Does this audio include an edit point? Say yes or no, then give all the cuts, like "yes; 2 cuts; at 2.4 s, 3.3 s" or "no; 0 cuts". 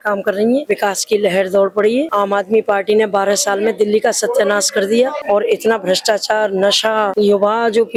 no; 0 cuts